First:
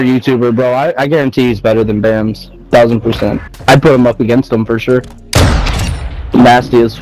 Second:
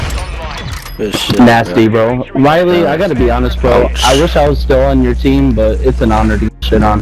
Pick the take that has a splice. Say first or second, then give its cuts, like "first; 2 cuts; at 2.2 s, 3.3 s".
first; 2 cuts; at 3.5 s, 5.2 s